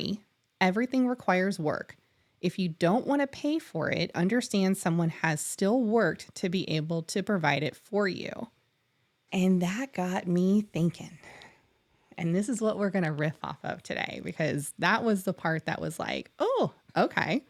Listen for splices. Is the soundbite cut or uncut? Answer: uncut